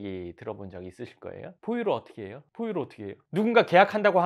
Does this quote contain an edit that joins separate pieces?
no; 0 cuts

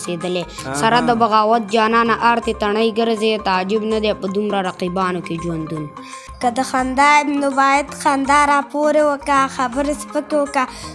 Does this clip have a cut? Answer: yes; 1 cut; at 6.2 s

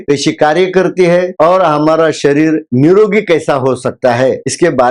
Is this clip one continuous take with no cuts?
yes; 0 cuts

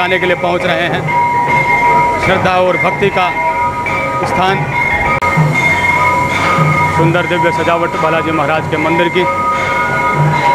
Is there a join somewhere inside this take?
no; 0 cuts

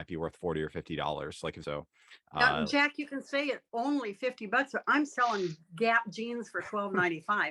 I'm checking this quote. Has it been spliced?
yes; 1 cut; at 1.6 s

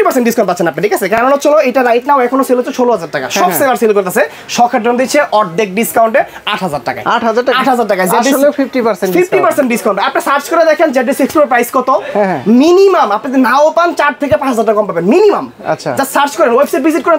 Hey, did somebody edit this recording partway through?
no; 0 cuts

